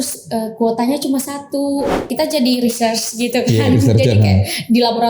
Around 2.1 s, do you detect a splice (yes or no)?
yes